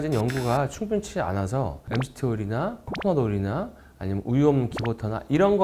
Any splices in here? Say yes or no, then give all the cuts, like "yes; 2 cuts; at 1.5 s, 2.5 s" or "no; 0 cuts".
no; 0 cuts